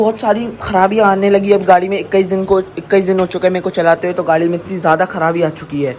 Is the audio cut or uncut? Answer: uncut